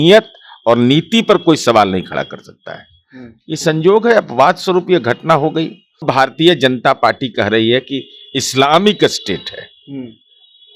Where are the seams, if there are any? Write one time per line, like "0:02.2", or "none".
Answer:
0:06.0